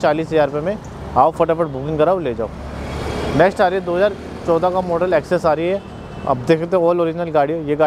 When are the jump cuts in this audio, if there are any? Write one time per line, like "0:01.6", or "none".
none